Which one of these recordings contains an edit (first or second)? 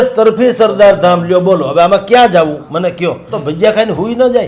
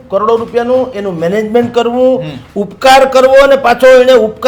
first